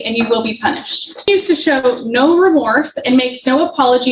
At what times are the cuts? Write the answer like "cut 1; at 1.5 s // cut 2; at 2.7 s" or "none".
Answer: cut 1; at 1.3 s